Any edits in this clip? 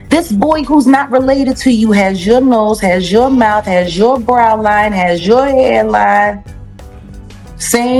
no; 0 cuts

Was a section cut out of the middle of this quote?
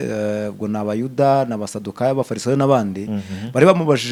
no; 0 cuts

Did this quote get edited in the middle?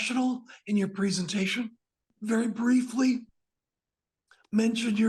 yes; 1 cut; at 2.1 s

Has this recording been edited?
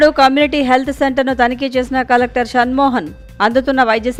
no; 0 cuts

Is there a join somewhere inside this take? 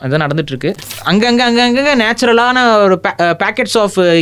yes; 1 cut; at 0.9 s

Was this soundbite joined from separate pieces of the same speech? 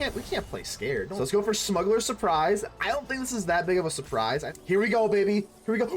yes; 2 cuts; at 1.1 s, 4.5 s

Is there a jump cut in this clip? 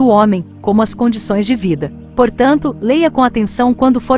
yes; 1 cut; at 2.0 s

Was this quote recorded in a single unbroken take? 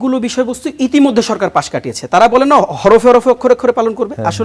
yes; 0 cuts

